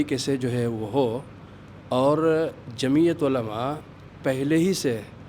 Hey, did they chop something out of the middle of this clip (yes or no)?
no